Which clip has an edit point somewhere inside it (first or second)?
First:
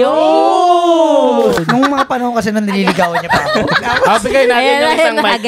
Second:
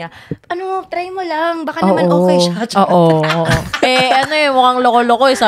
first